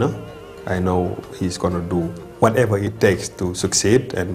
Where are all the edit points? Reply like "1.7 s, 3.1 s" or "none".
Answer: 2.2 s, 2.9 s